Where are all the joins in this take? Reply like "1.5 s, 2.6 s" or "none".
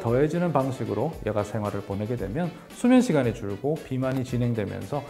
none